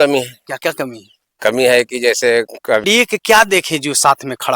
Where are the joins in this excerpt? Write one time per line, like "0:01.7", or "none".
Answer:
0:02.8